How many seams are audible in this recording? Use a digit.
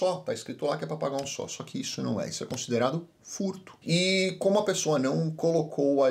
0